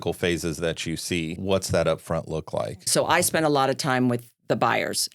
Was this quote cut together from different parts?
yes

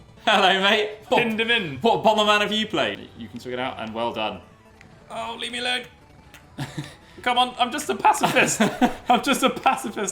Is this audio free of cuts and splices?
no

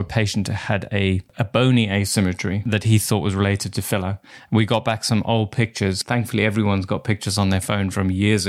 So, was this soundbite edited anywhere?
yes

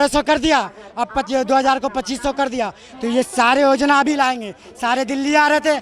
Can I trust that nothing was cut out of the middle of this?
yes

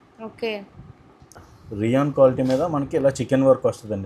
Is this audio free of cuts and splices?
no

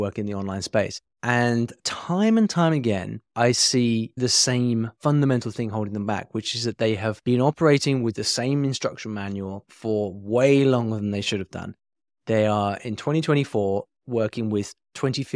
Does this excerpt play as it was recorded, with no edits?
no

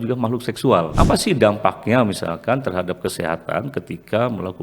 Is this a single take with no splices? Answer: no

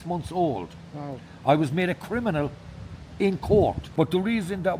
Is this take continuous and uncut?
no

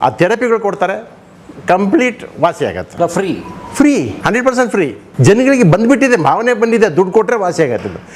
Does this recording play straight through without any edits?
no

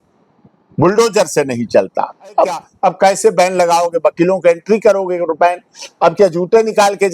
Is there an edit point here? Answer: yes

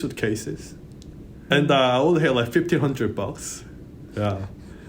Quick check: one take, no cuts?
yes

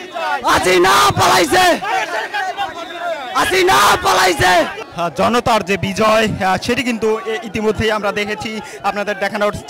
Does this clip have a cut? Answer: yes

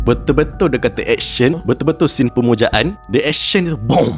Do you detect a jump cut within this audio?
yes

